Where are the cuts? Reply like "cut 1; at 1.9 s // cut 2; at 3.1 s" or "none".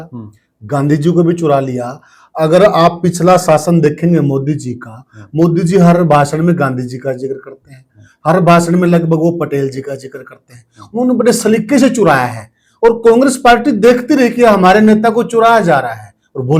none